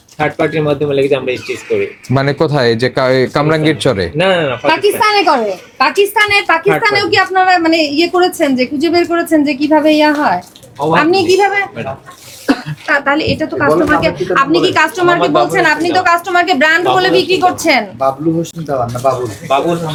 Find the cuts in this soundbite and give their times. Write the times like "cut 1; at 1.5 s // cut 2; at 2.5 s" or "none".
none